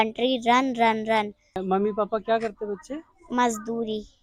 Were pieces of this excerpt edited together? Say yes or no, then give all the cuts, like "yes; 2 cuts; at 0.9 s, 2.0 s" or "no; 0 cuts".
no; 0 cuts